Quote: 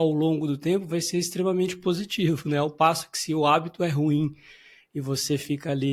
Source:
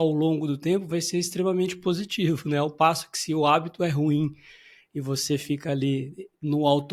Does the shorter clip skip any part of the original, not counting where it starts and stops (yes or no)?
no